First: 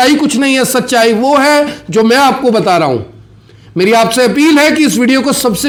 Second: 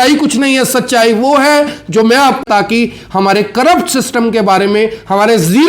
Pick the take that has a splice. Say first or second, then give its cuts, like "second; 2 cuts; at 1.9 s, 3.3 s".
second; 1 cut; at 2.4 s